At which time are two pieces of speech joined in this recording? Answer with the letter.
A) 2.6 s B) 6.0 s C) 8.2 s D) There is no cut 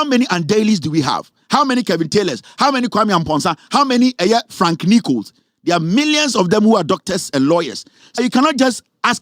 C